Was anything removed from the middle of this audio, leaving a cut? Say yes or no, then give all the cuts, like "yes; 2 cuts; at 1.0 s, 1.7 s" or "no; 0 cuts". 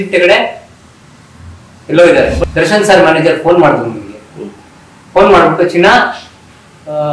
yes; 1 cut; at 2.4 s